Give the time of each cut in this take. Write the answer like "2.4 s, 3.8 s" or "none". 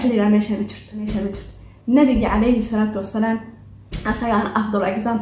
1.1 s